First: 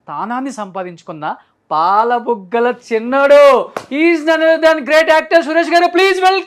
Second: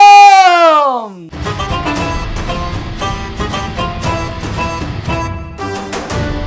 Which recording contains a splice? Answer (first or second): second